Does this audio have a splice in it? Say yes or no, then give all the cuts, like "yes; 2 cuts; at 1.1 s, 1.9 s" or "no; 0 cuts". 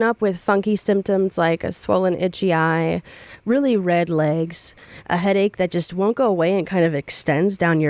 no; 0 cuts